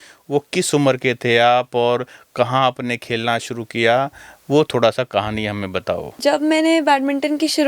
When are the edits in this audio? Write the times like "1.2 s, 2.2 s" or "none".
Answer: 6.1 s